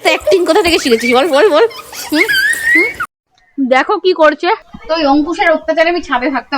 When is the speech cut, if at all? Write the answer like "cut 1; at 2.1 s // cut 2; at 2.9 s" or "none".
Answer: cut 1; at 3.0 s // cut 2; at 4.7 s